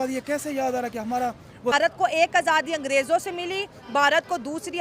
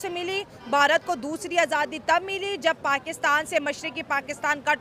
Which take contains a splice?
first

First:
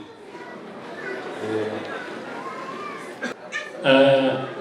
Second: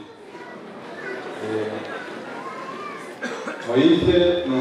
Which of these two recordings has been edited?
first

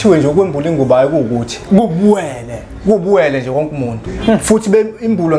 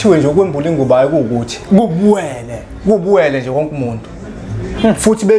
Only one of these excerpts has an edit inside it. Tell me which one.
first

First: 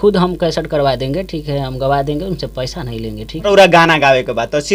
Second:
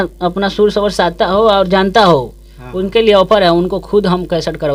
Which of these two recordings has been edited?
first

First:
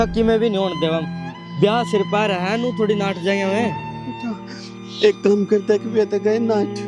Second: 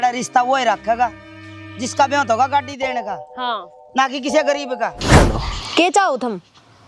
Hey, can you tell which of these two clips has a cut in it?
second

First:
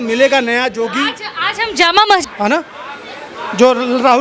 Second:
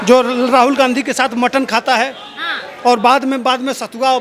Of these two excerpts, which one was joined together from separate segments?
first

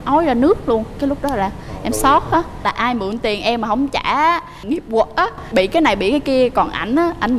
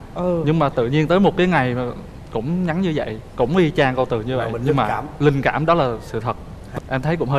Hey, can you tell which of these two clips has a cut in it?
first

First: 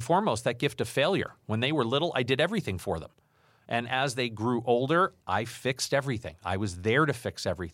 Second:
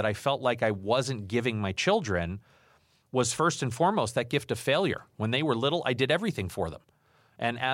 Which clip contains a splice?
first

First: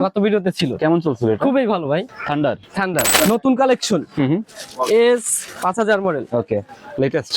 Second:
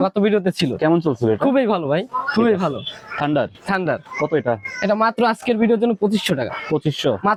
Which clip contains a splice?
first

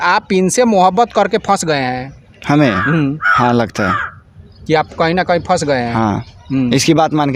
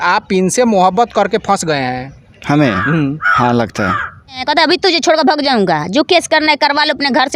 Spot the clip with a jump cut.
second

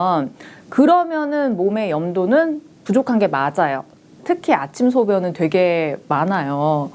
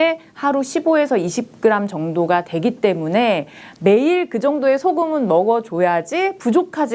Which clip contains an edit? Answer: first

